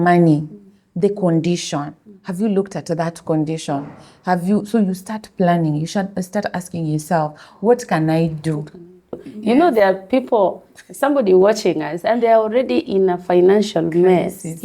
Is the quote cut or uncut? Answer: cut